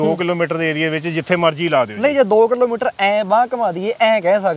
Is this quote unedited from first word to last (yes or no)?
yes